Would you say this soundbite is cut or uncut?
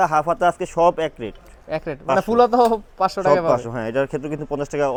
uncut